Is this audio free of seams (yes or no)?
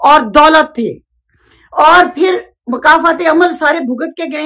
yes